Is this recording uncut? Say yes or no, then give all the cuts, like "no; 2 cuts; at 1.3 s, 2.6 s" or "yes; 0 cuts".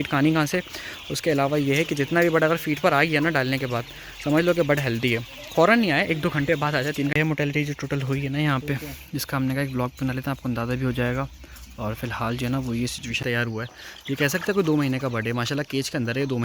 no; 2 cuts; at 7.1 s, 13.2 s